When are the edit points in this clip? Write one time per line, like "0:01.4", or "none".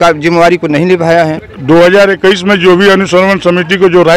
0:01.5